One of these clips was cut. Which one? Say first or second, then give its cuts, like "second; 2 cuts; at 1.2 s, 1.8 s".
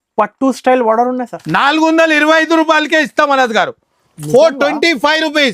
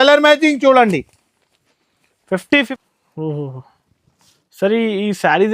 second; 1 cut; at 2.7 s